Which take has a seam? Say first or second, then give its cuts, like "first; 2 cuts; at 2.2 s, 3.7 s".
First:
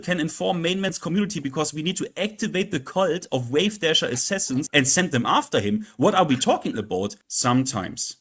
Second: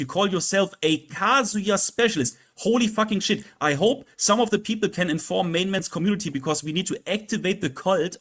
first; 2 cuts; at 4.7 s, 7.2 s